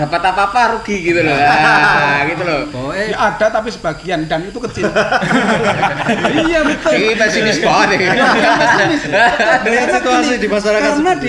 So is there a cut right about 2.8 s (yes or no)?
yes